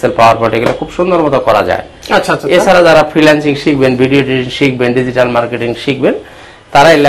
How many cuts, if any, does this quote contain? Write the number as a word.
zero